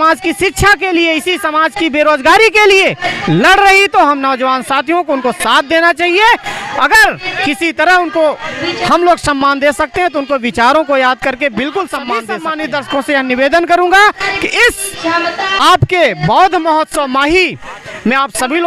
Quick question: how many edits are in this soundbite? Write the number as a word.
one